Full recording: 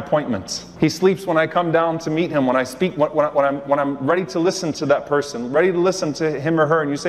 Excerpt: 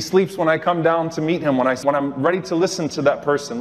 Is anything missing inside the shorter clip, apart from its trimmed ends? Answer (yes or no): yes